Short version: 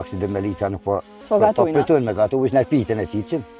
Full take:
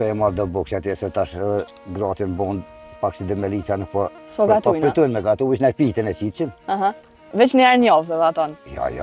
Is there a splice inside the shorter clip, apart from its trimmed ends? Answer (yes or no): no